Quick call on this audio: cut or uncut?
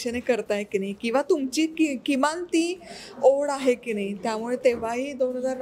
uncut